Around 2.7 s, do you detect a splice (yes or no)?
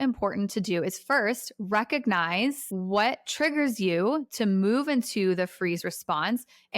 yes